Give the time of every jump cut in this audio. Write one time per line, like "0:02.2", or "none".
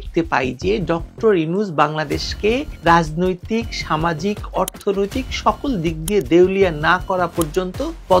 none